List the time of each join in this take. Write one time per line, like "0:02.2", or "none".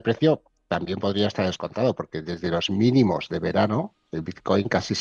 none